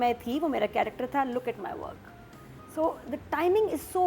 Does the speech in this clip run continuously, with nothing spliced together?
yes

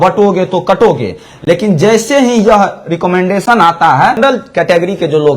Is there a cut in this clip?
yes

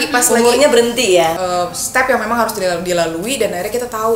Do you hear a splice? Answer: yes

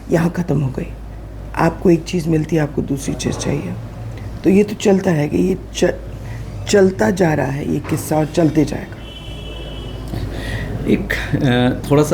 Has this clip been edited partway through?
no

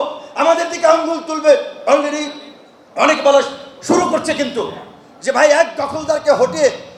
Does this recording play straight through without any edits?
yes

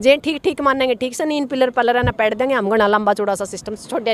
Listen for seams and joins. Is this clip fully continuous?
yes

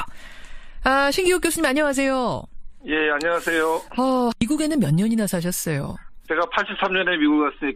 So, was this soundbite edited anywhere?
yes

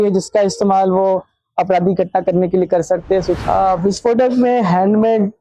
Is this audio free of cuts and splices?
no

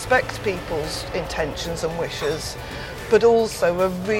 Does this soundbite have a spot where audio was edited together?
no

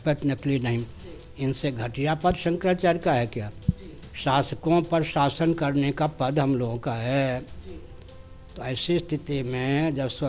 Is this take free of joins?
yes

